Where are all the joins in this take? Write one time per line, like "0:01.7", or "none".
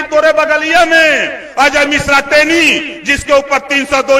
none